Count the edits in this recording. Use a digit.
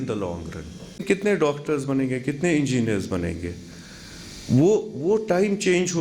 1